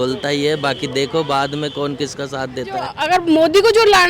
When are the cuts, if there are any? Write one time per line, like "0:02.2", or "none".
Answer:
0:03.0